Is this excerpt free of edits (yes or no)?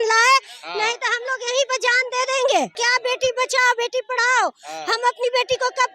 no